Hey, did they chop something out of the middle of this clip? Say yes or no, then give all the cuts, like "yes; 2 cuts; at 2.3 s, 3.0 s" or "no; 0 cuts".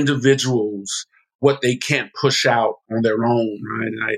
yes; 2 cuts; at 1.4 s, 2.8 s